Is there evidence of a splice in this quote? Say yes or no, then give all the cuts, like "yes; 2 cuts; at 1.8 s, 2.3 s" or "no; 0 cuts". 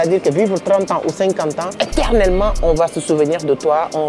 yes; 1 cut; at 1.7 s